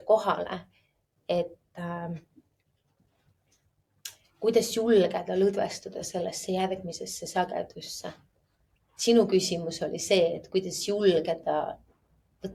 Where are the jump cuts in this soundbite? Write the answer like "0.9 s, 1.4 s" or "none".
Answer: none